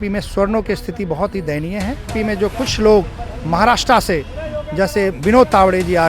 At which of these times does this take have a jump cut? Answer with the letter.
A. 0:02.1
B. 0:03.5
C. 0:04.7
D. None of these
A